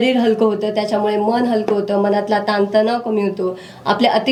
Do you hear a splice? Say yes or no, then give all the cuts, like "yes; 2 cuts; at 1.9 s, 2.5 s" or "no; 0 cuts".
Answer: no; 0 cuts